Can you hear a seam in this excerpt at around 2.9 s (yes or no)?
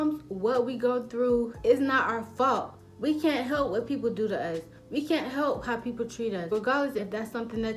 no